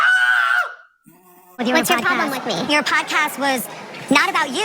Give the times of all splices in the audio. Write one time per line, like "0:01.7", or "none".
0:01.6